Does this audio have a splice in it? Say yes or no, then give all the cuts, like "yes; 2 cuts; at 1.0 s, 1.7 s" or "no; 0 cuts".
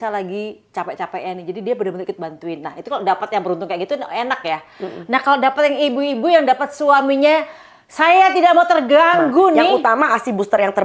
yes; 1 cut; at 9.8 s